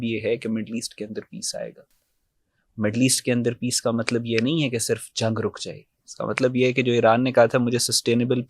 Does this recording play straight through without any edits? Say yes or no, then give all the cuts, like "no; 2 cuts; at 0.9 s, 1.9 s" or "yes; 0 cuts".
yes; 0 cuts